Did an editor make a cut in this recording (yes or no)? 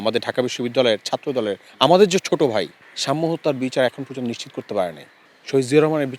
no